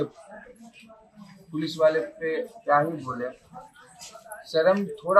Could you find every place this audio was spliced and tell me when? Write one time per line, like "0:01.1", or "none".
none